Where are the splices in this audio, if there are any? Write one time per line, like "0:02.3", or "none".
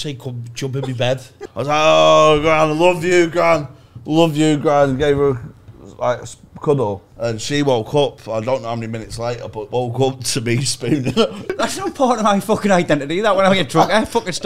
0:01.4
0:07.1
0:11.5